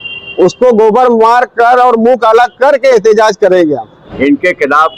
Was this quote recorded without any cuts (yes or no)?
no